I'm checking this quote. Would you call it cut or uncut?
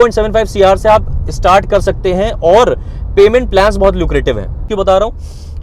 cut